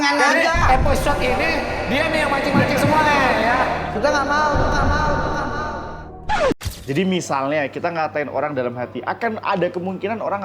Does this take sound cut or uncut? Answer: cut